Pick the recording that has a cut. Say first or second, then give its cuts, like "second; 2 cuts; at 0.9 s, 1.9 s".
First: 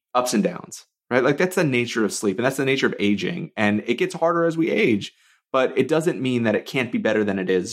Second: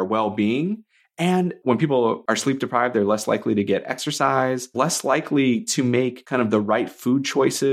second; 4 cuts; at 1.6 s, 2.2 s, 4.7 s, 6.2 s